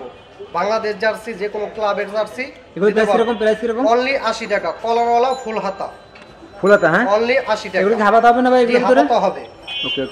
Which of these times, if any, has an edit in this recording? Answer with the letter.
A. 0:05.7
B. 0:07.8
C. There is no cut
C